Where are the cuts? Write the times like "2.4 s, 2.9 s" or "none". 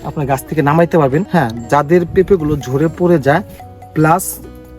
1.3 s